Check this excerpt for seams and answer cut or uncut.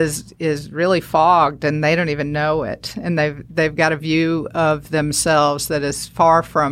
uncut